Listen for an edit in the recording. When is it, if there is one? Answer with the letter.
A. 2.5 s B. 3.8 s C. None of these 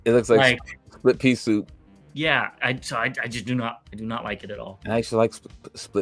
C